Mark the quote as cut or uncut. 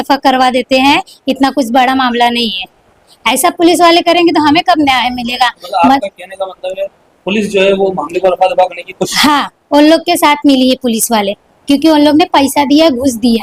uncut